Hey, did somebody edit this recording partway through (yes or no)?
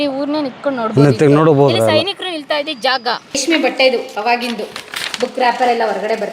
yes